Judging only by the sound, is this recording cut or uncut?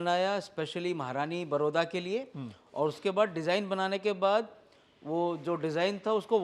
uncut